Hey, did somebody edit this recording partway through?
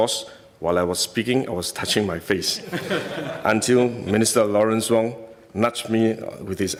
no; 0 cuts

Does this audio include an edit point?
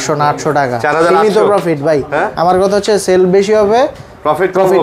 no; 0 cuts

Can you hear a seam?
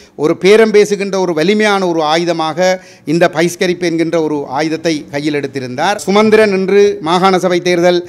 yes; 1 cut; at 6.0 s

